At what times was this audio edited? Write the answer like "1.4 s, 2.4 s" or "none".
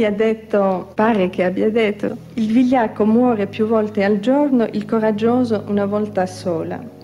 0.9 s, 2.2 s